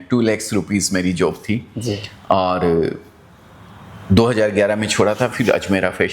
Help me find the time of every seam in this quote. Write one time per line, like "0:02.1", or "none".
none